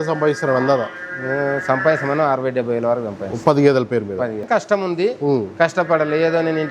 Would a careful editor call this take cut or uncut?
cut